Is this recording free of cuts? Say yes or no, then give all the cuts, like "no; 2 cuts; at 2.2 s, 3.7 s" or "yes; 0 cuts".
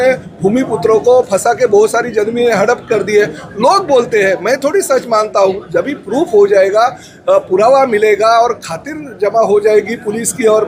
yes; 0 cuts